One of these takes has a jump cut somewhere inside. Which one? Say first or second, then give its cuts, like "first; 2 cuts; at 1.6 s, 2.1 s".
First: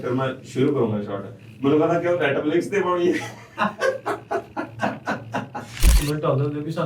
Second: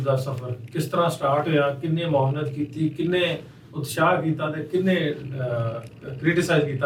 first; 1 cut; at 5.9 s